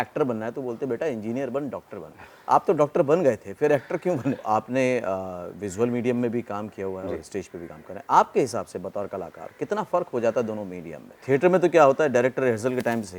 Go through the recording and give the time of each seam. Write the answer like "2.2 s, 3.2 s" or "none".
4.4 s, 11.2 s